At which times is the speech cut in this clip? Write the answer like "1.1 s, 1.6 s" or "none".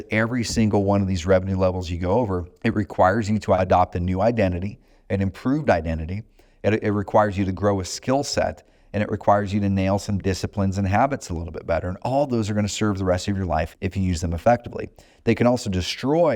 2.5 s, 3.6 s, 13.7 s

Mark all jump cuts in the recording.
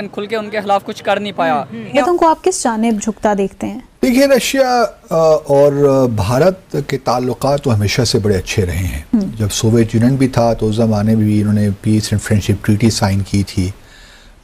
1.9 s

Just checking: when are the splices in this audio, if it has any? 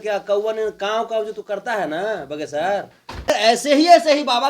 3.3 s

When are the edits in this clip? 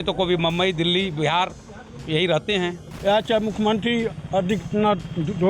2.9 s

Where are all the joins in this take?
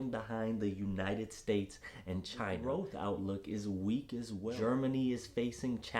2.6 s, 4.5 s

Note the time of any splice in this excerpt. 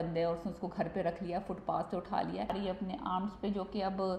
2.6 s

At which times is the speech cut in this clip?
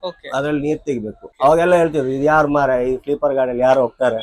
1.2 s

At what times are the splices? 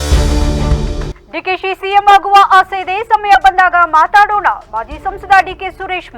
1.0 s

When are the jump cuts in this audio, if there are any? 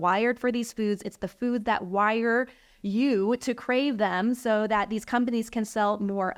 none

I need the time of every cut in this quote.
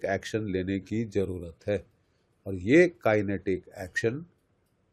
none

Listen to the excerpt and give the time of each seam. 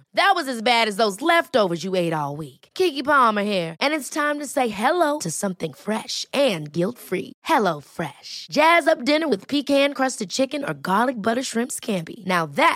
none

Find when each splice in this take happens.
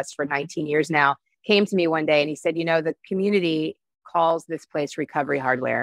3.0 s

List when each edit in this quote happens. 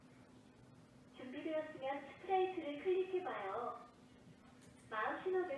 2.6 s

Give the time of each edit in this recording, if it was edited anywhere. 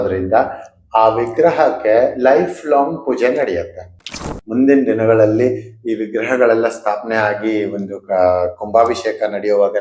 4.1 s

